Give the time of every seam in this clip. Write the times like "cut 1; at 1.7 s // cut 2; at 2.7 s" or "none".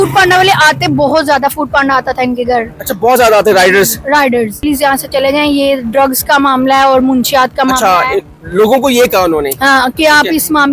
cut 1; at 4.6 s